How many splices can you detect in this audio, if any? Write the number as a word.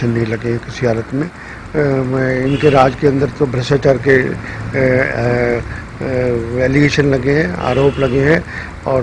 one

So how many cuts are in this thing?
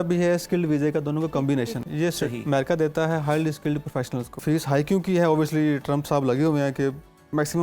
two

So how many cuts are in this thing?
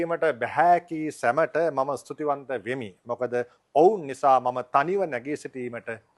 zero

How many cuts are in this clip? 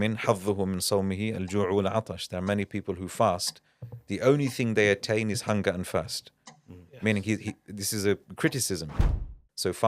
one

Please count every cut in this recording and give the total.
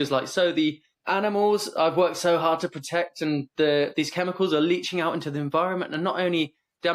one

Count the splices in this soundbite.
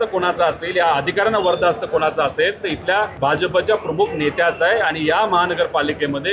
one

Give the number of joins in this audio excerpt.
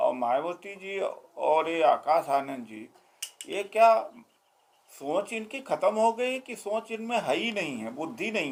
zero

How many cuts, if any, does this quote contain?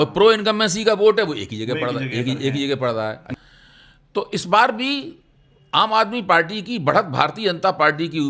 one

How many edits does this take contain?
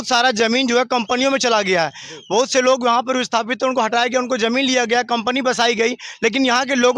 zero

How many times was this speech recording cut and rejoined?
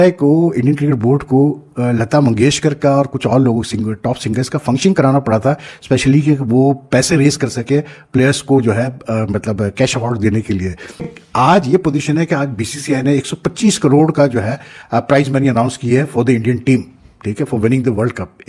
one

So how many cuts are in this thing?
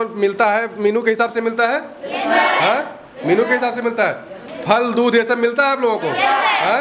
zero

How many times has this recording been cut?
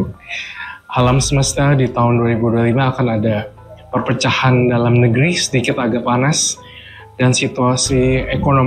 zero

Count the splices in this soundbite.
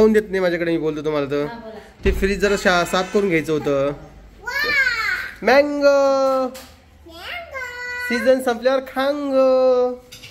zero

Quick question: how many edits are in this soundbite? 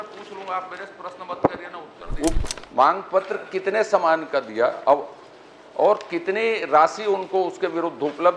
one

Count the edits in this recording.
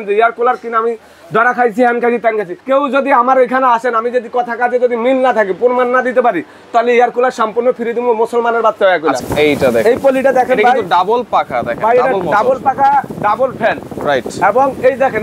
two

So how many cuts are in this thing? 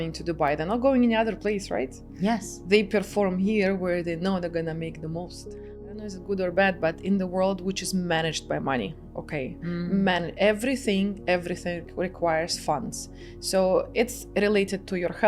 one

